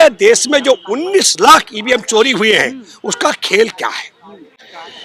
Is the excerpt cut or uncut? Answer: uncut